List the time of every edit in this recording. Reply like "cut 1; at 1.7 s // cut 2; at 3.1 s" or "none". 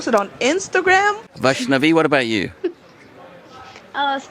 cut 1; at 1.3 s